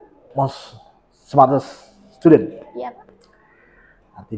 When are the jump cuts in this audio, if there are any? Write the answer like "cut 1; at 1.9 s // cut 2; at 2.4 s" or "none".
none